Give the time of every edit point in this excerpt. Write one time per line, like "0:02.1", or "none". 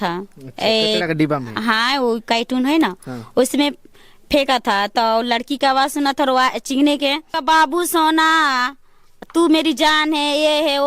0:07.4